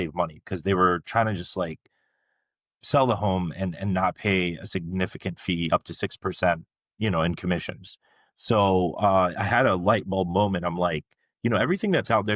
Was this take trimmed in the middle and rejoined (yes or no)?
no